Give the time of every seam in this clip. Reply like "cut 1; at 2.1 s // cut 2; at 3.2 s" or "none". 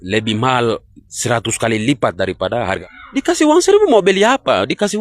cut 1; at 2.8 s